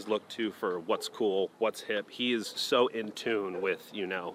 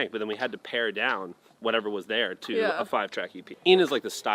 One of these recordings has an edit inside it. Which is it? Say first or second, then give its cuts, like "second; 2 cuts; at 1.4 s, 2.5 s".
second; 1 cut; at 3.4 s